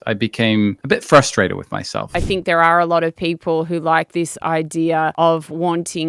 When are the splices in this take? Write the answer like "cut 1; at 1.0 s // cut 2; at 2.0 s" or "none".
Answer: cut 1; at 0.8 s // cut 2; at 2.1 s // cut 3; at 5.1 s

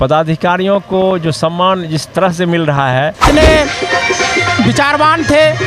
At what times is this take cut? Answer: cut 1; at 3.2 s

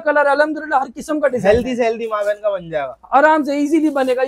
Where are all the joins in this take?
none

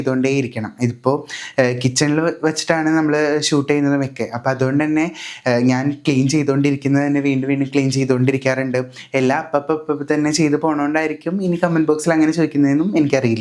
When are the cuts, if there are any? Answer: none

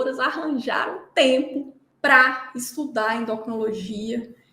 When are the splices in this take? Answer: cut 1; at 1.8 s

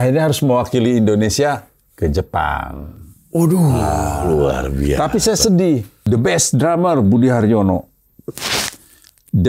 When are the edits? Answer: cut 1; at 5.9 s

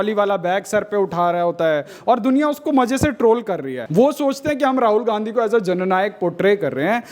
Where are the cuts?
cut 1; at 3.8 s

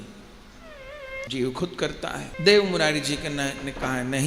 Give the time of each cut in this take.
cut 1; at 1.3 s // cut 2; at 2.3 s

